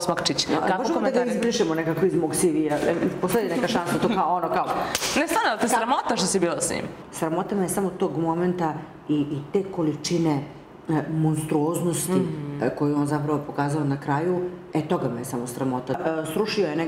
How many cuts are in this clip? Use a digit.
2